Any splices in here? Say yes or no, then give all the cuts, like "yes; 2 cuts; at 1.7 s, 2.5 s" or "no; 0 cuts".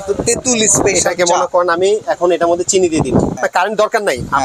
yes; 1 cut; at 3.4 s